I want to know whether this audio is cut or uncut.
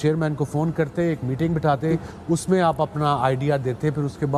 uncut